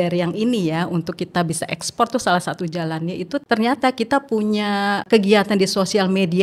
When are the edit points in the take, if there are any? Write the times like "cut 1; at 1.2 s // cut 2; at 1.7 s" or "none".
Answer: cut 1; at 3.4 s // cut 2; at 5.0 s